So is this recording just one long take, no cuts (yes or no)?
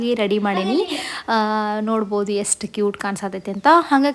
yes